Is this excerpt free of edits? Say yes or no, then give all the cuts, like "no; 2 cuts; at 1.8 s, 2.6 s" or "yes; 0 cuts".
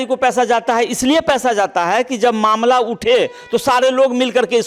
yes; 0 cuts